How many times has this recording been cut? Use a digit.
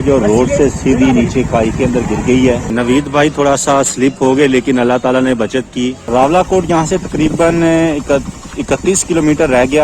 2